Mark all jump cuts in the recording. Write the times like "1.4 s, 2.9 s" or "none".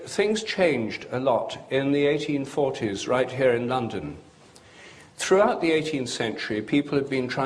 4.1 s